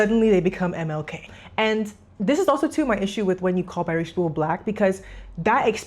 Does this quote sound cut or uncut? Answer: cut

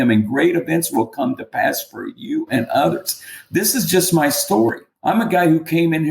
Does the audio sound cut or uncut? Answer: cut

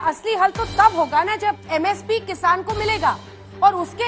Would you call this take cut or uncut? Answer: cut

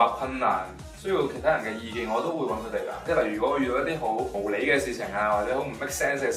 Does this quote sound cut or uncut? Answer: cut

